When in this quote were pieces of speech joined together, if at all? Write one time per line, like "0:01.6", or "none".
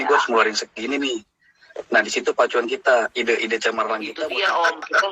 0:04.0